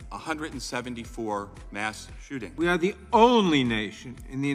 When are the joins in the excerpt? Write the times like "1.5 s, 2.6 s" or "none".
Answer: 2.4 s